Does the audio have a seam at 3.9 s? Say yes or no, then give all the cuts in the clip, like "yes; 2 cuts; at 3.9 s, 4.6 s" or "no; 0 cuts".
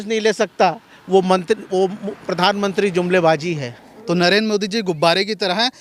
yes; 1 cut; at 3.9 s